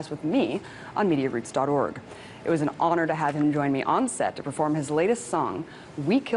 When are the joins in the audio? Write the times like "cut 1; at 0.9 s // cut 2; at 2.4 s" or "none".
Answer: cut 1; at 4.3 s

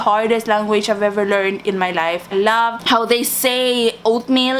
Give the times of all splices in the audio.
cut 1; at 2.3 s

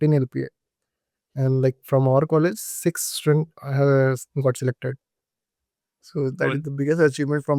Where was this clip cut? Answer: none

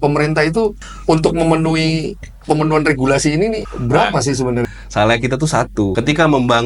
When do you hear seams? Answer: cut 1; at 0.9 s // cut 2; at 3.7 s // cut 3; at 4.6 s // cut 4; at 5.9 s

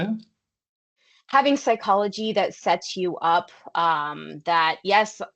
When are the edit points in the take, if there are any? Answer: cut 1; at 0.9 s

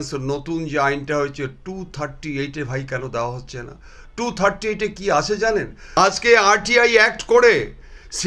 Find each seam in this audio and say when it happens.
cut 1; at 5.8 s

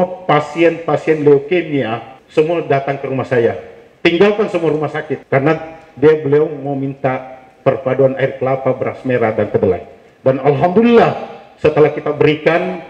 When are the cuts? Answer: cut 1; at 2.1 s // cut 2; at 5.2 s

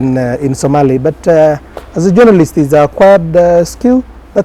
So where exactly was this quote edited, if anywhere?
none

